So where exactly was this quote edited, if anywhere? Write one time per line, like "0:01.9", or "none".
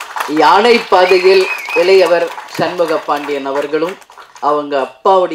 none